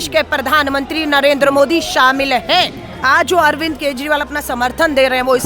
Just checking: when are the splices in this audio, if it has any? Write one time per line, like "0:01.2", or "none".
0:02.8